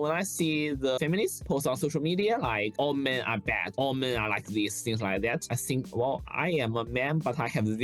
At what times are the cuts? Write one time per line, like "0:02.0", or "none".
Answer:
0:01.0